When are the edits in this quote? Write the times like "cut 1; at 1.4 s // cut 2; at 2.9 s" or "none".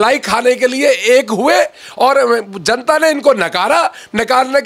none